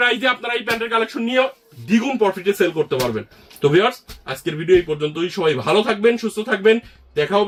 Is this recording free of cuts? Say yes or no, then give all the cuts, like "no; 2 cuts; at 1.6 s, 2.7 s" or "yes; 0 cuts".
yes; 0 cuts